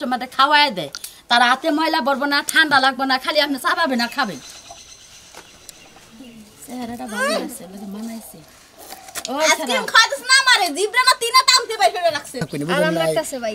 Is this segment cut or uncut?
cut